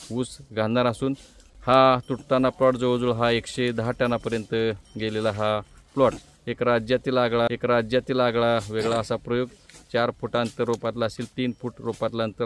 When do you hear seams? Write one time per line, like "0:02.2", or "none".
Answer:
none